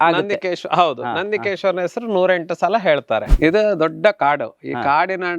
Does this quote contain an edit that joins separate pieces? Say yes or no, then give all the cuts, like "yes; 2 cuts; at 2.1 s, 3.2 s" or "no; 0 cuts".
yes; 1 cut; at 3.3 s